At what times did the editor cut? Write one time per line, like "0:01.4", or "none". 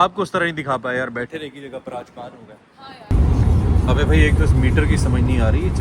0:03.1